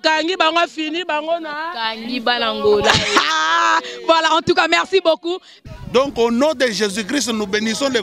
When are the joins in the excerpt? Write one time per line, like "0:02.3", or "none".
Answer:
0:05.5